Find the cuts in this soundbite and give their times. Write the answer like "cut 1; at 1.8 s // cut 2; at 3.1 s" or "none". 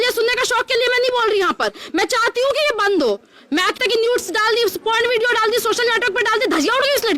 cut 1; at 3.8 s